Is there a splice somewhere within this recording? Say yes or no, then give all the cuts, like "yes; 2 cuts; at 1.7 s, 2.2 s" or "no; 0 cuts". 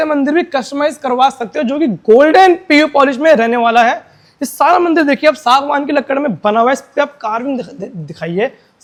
no; 0 cuts